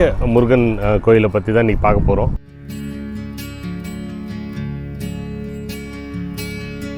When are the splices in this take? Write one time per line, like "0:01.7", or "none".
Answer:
0:02.4

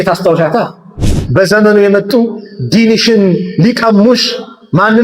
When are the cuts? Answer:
0:01.0

